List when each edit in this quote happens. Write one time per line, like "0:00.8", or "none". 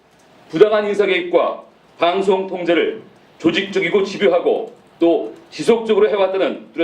0:01.2